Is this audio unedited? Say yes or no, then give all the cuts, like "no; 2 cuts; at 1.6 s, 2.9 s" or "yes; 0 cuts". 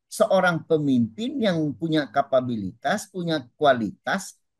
yes; 0 cuts